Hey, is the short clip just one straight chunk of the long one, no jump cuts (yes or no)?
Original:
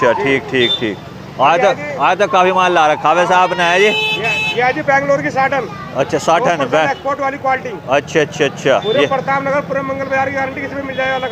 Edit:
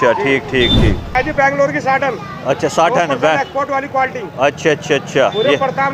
no